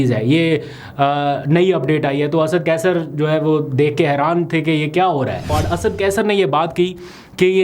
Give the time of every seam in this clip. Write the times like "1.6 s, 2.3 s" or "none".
5.5 s